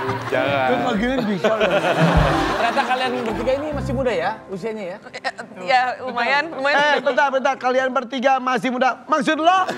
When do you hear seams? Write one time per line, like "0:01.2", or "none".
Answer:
0:02.5

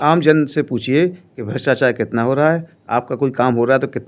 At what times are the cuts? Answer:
none

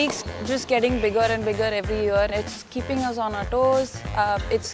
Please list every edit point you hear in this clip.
0:02.3

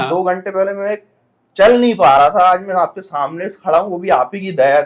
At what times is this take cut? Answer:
none

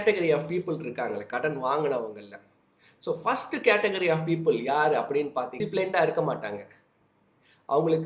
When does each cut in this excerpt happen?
0:05.6

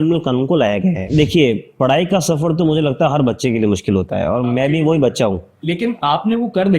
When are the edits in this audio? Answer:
0:01.0
0:05.6

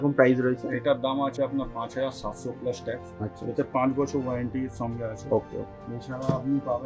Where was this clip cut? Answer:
none

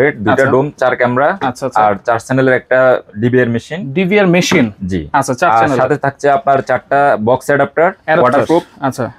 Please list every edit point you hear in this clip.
none

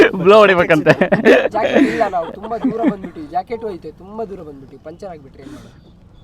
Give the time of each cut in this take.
none

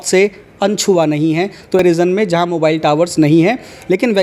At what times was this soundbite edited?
0:01.8

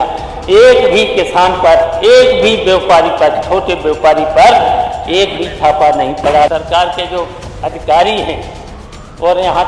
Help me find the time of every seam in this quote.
0:06.5

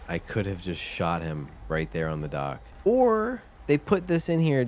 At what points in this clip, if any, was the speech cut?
0:02.7
0:03.5

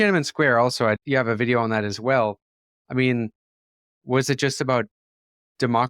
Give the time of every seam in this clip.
0:01.0

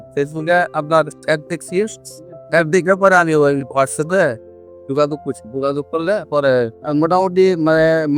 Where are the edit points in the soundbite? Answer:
0:06.8

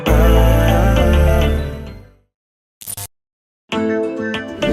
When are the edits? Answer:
0:03.6

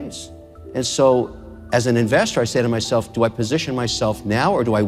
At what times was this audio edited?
none

